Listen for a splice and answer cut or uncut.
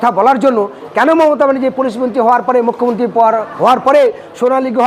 uncut